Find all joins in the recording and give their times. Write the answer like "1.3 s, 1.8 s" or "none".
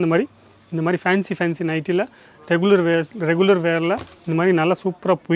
none